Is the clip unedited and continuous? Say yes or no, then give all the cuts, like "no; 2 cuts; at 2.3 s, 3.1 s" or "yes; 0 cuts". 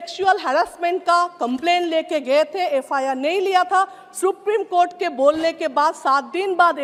yes; 0 cuts